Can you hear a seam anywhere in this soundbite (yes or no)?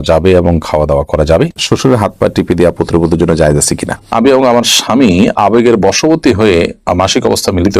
yes